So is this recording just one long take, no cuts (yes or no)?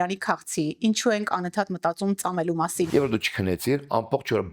no